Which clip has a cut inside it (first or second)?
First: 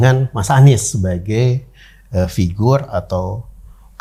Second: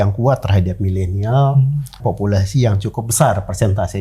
second